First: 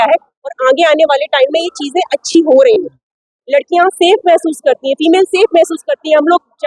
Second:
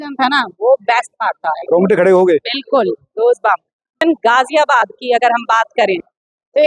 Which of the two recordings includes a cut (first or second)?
second